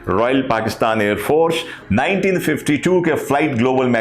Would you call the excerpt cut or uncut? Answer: cut